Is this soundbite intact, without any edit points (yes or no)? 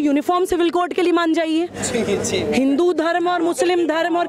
yes